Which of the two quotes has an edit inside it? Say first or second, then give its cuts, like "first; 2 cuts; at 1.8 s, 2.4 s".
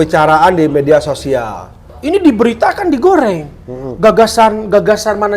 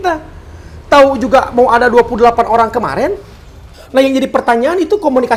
first; 1 cut; at 1.9 s